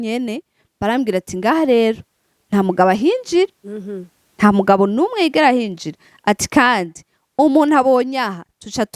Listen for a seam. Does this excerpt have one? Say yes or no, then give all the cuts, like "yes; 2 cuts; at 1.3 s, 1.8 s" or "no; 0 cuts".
no; 0 cuts